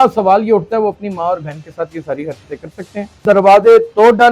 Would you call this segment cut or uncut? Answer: cut